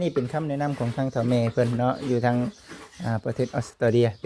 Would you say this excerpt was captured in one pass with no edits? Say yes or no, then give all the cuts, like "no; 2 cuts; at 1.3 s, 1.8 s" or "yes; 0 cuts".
yes; 0 cuts